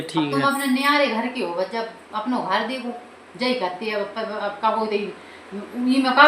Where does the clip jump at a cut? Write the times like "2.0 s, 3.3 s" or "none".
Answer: none

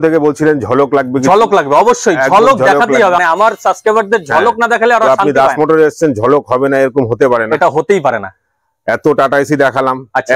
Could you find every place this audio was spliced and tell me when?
none

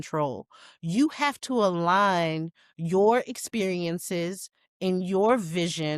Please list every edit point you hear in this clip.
none

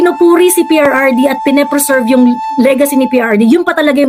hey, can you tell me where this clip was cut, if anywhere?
none

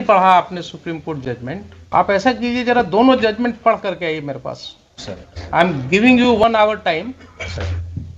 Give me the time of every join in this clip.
1.9 s

